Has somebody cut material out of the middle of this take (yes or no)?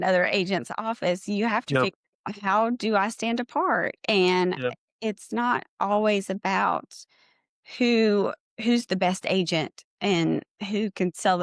no